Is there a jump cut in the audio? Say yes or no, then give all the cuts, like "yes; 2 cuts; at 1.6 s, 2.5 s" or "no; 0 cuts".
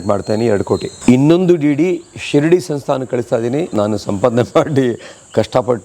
yes; 2 cuts; at 0.9 s, 3.7 s